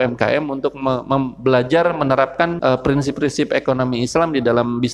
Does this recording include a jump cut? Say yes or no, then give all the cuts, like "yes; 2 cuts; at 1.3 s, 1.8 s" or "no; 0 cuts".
yes; 1 cut; at 2.6 s